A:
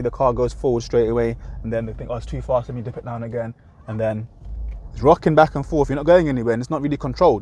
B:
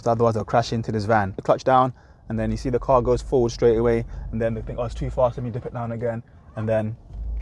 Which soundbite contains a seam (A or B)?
B